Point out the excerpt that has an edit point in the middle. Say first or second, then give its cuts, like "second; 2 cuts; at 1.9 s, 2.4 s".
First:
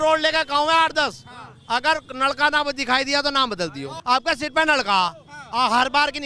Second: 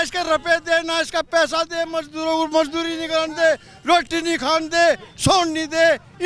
first; 1 cut; at 3.9 s